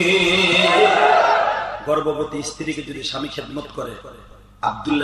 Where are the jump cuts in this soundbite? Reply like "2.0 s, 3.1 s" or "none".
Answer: 1.8 s